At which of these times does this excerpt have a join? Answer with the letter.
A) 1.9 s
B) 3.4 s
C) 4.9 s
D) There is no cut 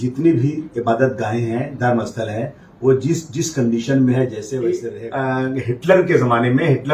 C